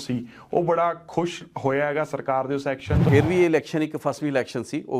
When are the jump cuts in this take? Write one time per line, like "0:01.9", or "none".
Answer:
0:03.0

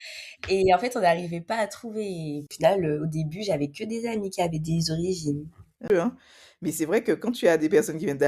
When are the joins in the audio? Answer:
0:02.5
0:05.9

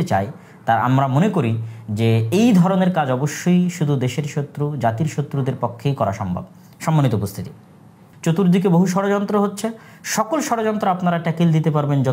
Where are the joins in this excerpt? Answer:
0:08.1

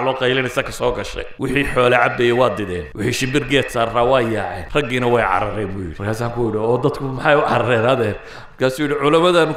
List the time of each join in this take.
0:01.2
0:02.8
0:04.6
0:05.9

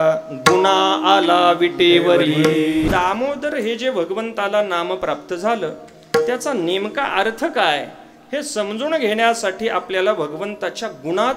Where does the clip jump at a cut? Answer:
0:02.9

